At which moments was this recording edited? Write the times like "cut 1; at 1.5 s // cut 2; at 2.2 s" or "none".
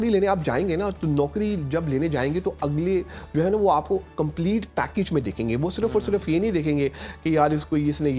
none